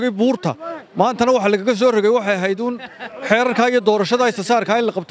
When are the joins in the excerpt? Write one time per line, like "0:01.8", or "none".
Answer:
none